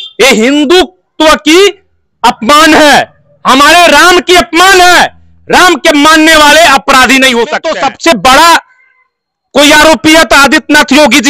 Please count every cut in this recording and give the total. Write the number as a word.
one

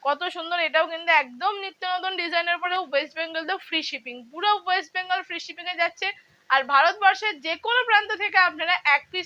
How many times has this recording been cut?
one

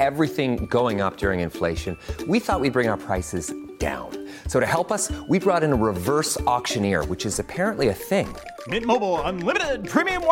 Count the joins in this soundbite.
zero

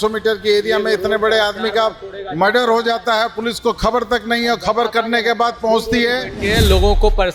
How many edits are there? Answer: one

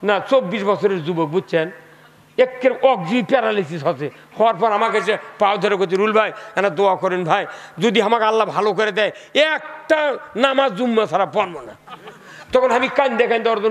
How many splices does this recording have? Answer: zero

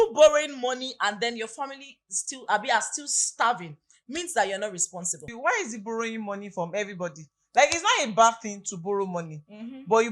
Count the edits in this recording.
one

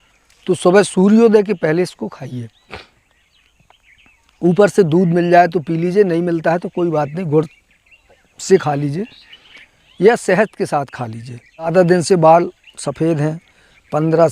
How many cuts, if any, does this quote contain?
one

